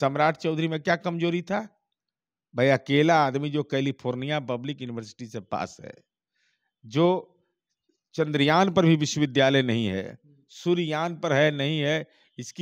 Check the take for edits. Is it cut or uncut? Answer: uncut